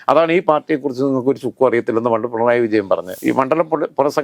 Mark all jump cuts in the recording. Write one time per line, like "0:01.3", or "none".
0:03.1